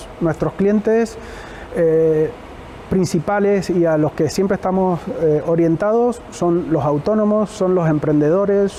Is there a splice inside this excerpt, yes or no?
no